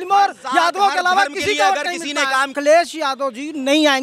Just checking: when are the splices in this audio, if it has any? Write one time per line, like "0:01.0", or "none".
0:02.5